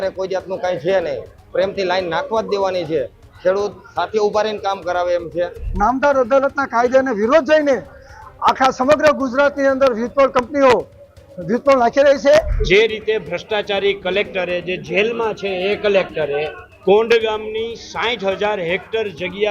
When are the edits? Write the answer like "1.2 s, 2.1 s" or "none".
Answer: 5.6 s, 12.6 s, 16.6 s